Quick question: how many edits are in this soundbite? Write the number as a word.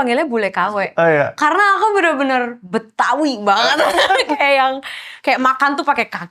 zero